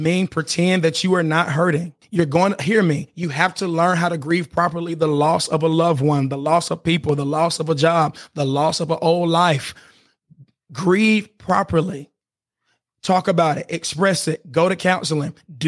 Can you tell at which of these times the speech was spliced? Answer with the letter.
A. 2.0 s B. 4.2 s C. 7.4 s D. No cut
A